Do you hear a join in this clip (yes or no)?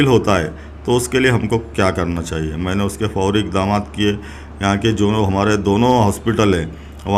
no